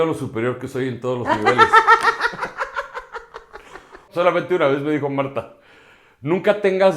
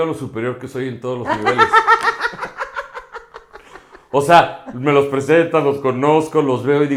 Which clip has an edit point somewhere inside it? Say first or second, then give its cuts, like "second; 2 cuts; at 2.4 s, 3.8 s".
first; 1 cut; at 4.1 s